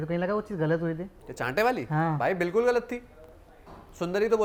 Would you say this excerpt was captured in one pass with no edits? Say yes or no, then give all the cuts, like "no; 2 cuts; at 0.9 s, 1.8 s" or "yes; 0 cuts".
yes; 0 cuts